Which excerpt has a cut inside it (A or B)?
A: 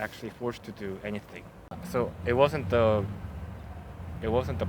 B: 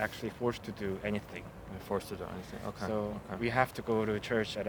A